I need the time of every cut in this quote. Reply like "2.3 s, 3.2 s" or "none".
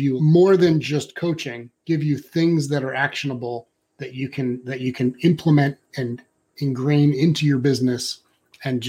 none